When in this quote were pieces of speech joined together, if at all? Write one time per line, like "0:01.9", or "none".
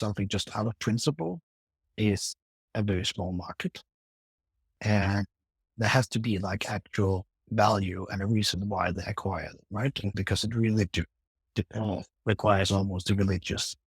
0:04.7
0:10.2